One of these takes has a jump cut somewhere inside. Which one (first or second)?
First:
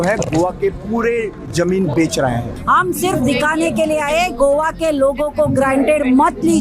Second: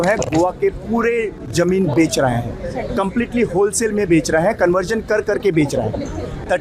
first